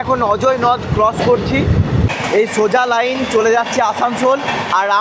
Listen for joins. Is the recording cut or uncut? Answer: cut